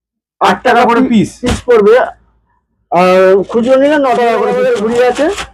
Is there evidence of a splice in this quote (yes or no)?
yes